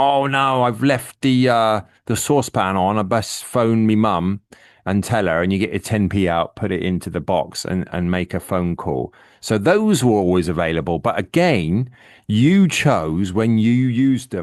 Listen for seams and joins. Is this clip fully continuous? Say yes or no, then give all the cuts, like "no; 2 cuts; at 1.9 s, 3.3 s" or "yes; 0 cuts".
yes; 0 cuts